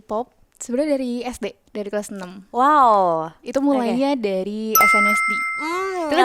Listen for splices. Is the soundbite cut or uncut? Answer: uncut